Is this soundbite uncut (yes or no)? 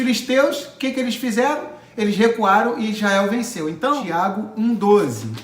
no